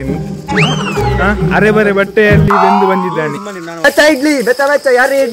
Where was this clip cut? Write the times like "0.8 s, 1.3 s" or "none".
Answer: 3.8 s